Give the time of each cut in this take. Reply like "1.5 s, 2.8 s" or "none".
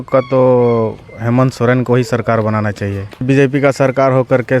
3.2 s

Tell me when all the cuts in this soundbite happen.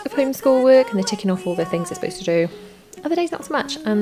none

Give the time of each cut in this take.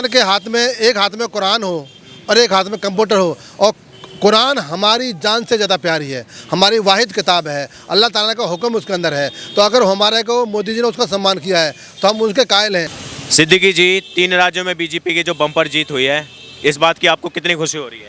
13.0 s

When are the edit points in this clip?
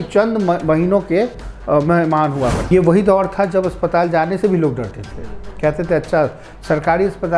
2.7 s

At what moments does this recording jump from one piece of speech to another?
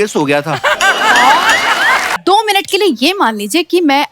2.1 s

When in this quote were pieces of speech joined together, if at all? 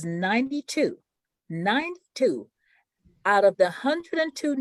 none

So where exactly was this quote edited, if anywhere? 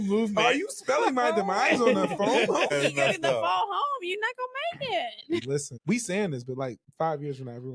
2.7 s, 5.4 s, 6.8 s

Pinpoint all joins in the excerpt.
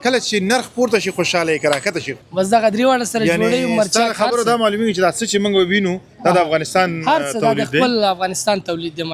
2.2 s

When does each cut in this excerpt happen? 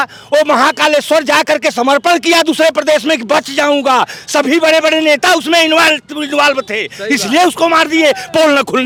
none

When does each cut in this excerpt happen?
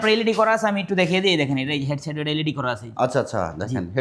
none

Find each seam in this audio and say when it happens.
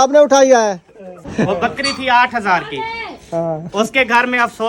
1.2 s

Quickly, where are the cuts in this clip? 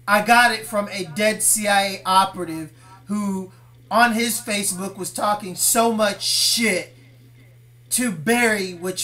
none

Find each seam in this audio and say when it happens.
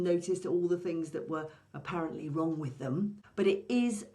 3.2 s

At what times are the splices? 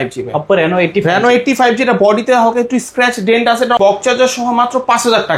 3.8 s

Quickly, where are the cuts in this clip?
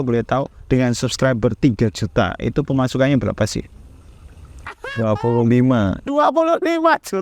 none

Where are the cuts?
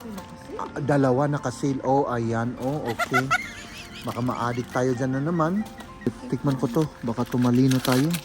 6.1 s

